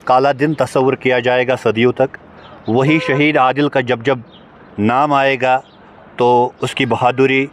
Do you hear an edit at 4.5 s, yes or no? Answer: no